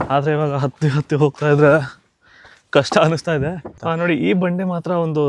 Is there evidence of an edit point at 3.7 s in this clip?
yes; 1 cut; at 3.7 s

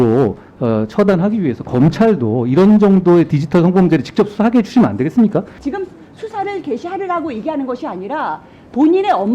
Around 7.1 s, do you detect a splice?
no; 1 cut; at 5.6 s

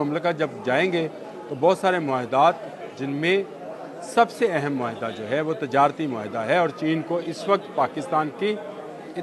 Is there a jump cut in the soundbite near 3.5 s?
no; 0 cuts

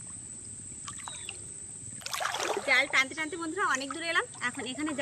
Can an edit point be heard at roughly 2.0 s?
yes; 1 cut; at 2.0 s

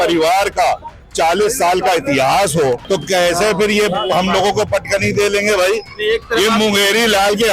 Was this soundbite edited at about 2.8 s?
yes; 1 cut; at 2.8 s

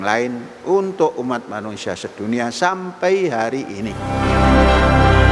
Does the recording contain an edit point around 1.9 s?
no; 1 cut; at 4.0 s

